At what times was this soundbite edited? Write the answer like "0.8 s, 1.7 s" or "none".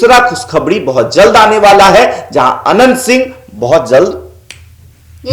none